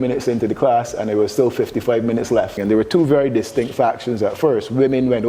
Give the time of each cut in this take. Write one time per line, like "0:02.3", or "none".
0:02.6